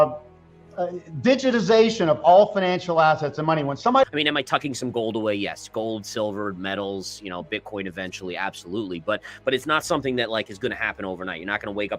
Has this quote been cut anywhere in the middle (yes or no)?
yes